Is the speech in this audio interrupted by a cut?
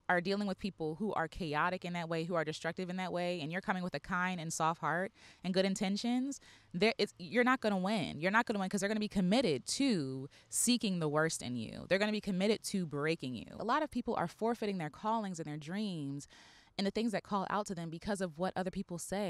yes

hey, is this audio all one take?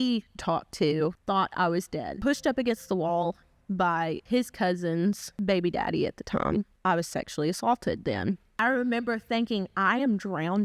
no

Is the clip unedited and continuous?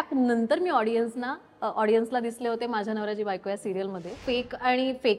no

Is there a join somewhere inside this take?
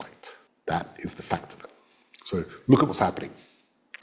no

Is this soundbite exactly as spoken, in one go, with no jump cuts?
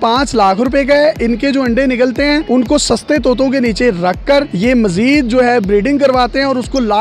yes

